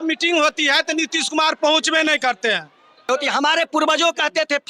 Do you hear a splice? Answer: yes; 1 cut; at 3.1 s

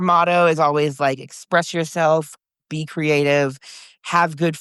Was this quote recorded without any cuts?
yes; 0 cuts

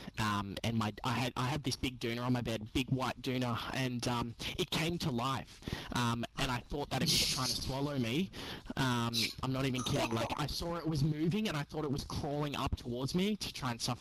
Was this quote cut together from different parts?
no; 0 cuts

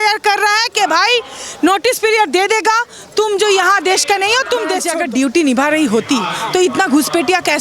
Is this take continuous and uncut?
no; 1 cut; at 4.9 s

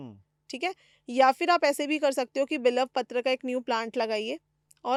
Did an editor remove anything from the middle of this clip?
no; 0 cuts

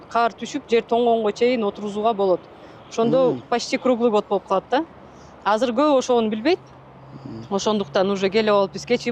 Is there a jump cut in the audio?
no; 0 cuts

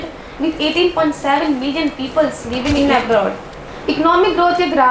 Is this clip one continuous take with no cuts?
no; 1 cut; at 2.8 s

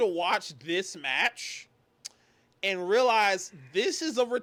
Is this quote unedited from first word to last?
yes; 0 cuts

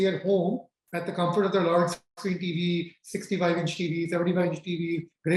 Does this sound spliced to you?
no; 0 cuts

